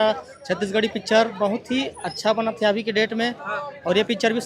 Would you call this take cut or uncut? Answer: uncut